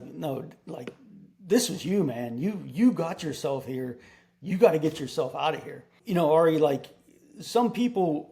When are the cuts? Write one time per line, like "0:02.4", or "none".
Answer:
none